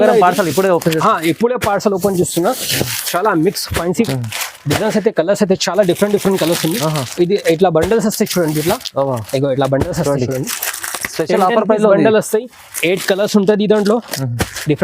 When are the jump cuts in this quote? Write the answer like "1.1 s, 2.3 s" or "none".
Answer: 4.1 s